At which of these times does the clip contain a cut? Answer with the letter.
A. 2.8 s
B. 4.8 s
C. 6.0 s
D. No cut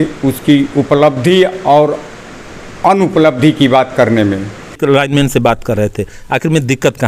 B